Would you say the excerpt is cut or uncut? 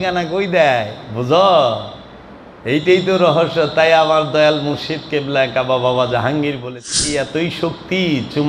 cut